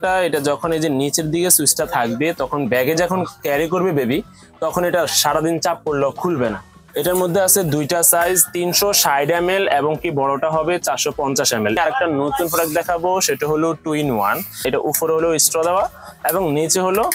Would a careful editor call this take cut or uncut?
cut